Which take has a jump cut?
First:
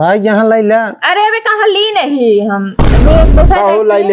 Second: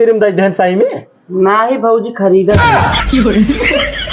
second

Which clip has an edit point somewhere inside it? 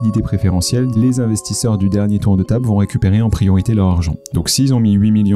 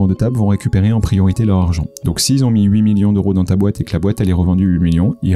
first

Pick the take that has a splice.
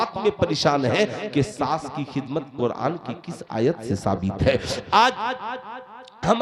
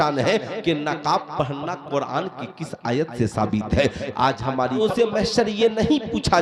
second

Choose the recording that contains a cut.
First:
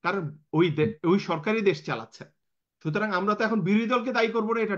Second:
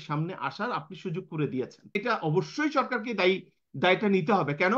second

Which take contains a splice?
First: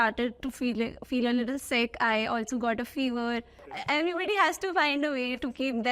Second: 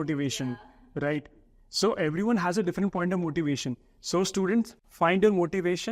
first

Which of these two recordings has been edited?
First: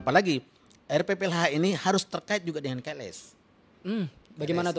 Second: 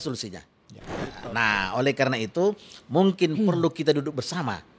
second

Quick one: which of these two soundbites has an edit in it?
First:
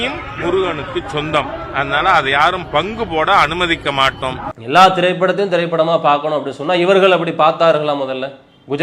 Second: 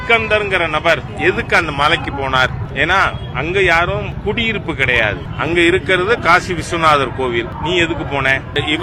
first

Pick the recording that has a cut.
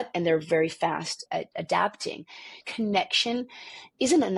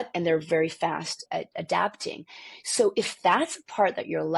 first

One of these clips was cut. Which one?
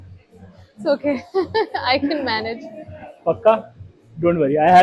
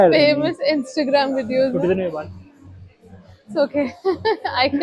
second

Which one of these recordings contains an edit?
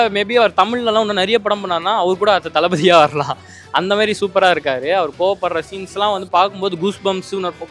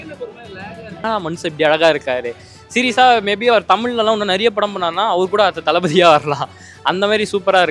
second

